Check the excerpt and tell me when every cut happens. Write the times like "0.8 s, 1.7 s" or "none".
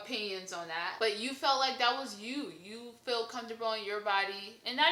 none